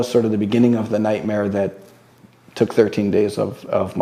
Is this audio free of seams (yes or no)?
yes